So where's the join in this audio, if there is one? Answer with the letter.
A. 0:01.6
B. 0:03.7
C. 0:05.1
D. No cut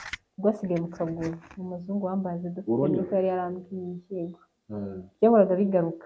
D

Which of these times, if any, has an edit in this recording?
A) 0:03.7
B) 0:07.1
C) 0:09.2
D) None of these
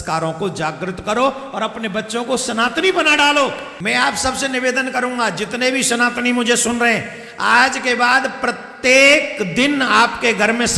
A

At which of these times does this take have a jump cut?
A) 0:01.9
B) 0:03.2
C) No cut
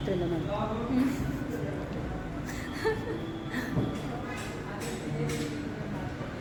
C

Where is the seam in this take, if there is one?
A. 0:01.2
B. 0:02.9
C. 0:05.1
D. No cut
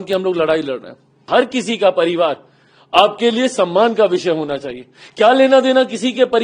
A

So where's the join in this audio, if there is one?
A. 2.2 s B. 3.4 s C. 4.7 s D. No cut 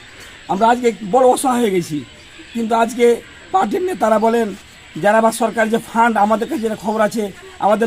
D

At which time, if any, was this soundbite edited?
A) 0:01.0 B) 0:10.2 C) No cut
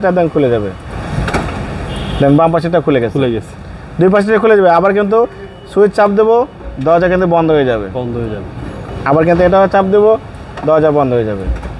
A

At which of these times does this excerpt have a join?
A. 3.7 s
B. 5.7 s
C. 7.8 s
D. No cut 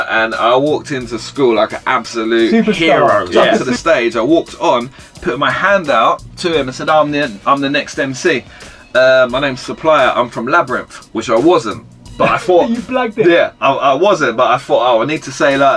A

